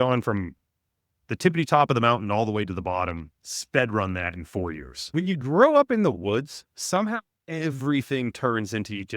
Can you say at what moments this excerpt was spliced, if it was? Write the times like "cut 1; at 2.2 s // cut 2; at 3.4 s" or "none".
cut 1; at 4.9 s